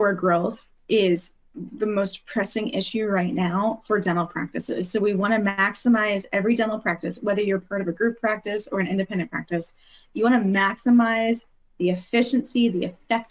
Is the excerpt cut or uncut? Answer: uncut